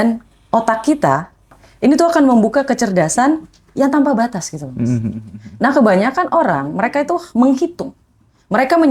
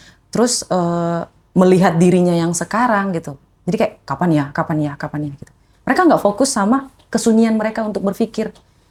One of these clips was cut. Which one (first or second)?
first